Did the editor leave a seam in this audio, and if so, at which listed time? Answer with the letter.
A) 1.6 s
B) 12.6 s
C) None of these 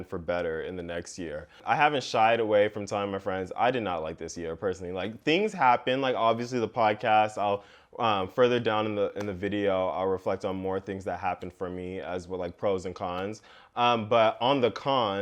A